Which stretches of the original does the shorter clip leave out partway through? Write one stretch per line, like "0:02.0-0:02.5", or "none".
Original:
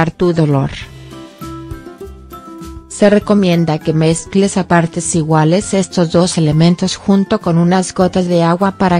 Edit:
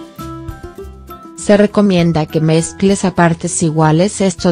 0:02.6-0:02.9